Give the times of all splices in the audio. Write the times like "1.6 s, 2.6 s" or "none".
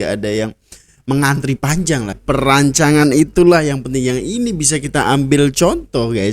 2.2 s